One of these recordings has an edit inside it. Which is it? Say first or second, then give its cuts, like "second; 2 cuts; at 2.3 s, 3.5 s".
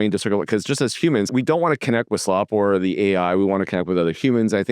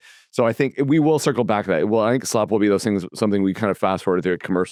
first; 1 cut; at 1.3 s